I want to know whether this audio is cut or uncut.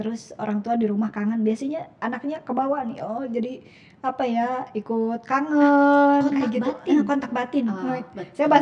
uncut